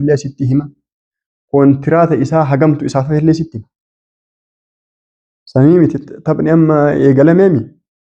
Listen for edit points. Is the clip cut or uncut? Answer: uncut